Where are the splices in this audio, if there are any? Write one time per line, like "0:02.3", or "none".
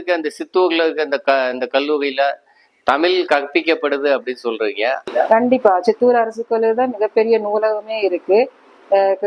0:05.0